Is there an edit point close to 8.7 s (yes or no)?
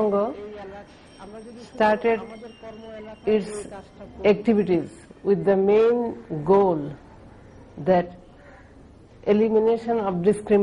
yes